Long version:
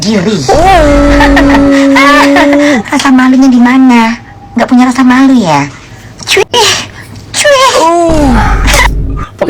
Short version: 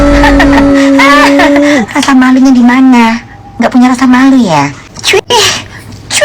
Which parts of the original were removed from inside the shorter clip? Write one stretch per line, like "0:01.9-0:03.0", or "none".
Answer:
0:05.9-0:06.1